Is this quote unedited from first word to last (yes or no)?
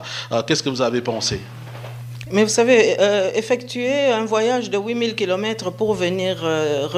yes